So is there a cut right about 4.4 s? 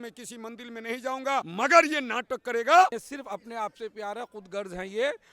no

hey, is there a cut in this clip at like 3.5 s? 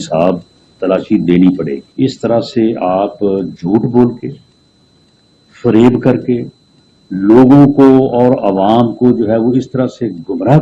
no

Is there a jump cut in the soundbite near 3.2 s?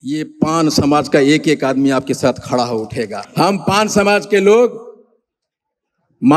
yes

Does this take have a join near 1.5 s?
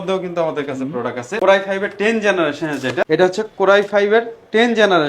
no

